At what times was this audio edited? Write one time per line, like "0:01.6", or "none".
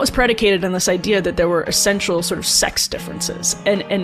none